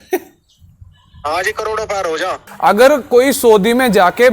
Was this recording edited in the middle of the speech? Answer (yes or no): yes